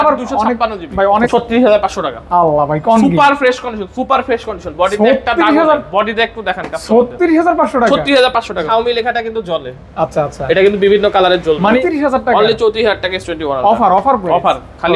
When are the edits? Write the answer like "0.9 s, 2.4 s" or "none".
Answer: 1.3 s, 8.7 s, 11.7 s